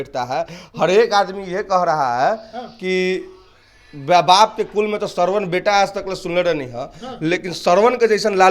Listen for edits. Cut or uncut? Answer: uncut